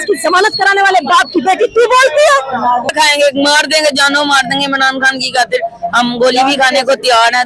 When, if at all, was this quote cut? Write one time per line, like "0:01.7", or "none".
0:02.9

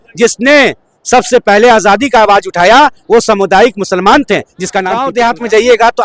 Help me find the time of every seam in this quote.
0:05.0

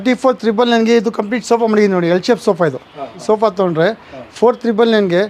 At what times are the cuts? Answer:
0:03.1

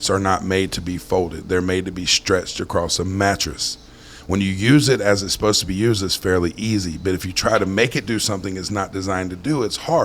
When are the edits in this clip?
none

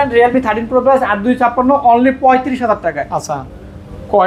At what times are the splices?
none

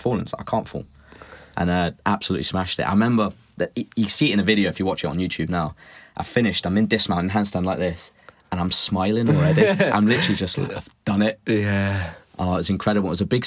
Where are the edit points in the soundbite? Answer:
none

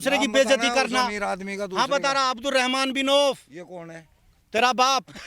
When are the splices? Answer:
none

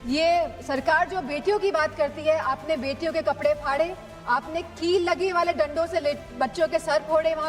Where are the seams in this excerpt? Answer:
none

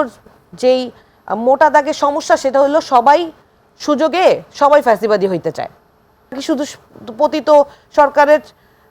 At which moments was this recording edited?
0:06.4

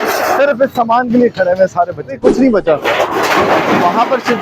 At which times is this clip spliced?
0:02.2

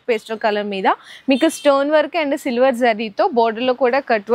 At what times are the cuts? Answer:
none

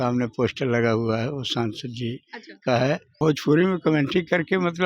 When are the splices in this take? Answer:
0:03.1

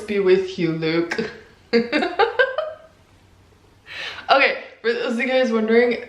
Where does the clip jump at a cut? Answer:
0:02.0

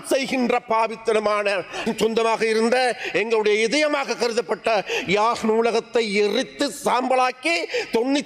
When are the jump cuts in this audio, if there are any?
0:01.8

